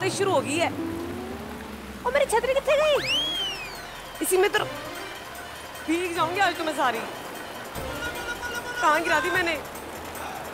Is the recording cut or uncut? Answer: uncut